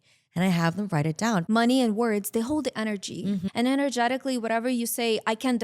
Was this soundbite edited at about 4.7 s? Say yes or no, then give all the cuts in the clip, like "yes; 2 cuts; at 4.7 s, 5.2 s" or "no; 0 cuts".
no; 2 cuts; at 1.4 s, 3.4 s